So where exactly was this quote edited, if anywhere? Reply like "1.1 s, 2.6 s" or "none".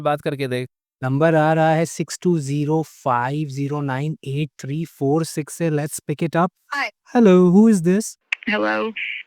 6.6 s